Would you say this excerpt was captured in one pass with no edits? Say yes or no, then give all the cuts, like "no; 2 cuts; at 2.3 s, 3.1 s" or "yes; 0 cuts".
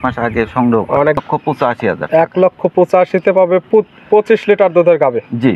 no; 1 cut; at 1.2 s